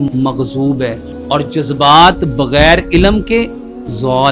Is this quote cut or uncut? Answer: cut